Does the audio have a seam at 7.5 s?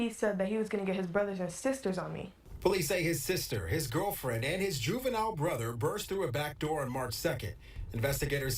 no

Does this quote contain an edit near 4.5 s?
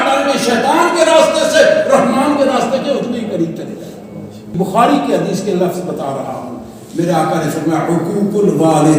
yes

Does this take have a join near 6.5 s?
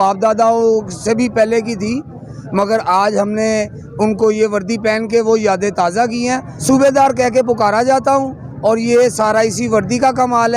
yes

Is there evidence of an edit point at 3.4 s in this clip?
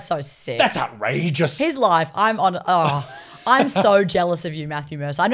no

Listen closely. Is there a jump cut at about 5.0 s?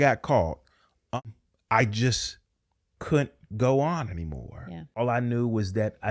yes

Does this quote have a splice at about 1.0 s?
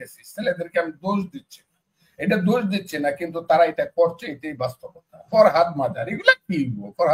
no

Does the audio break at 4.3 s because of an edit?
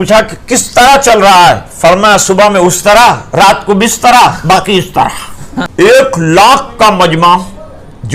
no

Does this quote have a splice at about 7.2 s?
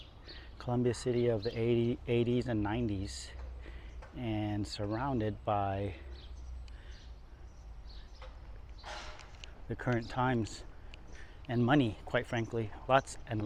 no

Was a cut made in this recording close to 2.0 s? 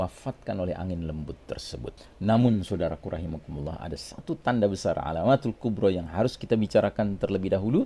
yes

